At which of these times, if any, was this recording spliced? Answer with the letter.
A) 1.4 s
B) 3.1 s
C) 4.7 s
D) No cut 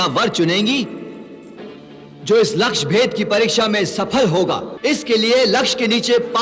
C